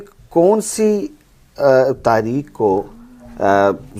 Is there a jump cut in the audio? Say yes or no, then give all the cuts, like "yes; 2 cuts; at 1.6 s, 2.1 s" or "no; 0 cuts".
no; 0 cuts